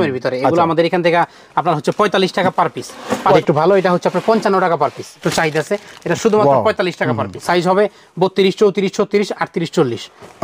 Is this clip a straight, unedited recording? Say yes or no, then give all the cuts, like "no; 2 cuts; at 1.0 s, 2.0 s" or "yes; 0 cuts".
no; 3 cuts; at 3.4 s, 5.3 s, 7.4 s